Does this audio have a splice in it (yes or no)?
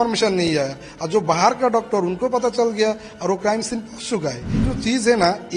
yes